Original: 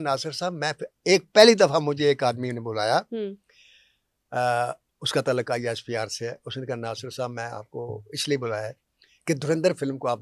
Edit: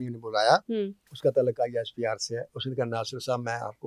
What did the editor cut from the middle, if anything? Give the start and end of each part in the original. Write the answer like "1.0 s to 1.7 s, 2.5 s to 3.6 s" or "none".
3.5 s to 4.9 s